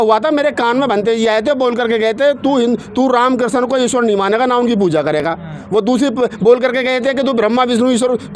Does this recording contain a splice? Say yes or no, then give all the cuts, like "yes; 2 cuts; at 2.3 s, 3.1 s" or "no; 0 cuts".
no; 0 cuts